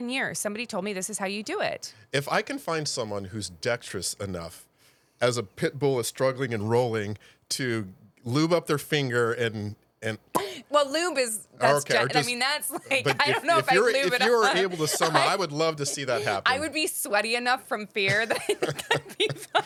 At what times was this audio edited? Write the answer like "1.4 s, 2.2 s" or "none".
none